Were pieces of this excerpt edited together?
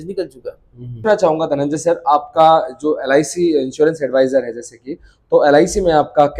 yes; 1 cut; at 1.1 s

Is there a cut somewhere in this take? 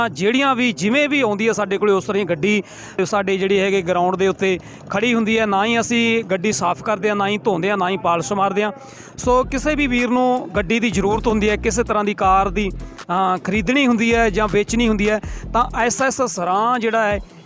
yes; 1 cut; at 3.0 s

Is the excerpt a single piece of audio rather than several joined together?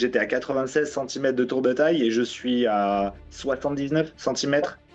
yes; 0 cuts

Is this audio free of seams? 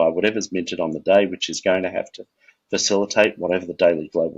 yes; 0 cuts

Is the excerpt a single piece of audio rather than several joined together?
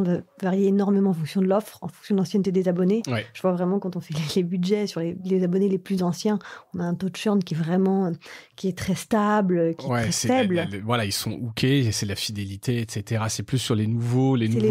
yes; 0 cuts

